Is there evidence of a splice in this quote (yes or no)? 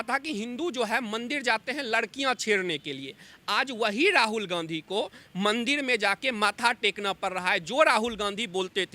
no